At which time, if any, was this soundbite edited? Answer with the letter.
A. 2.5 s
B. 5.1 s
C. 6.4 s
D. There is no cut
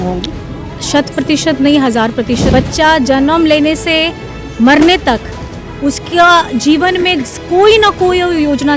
A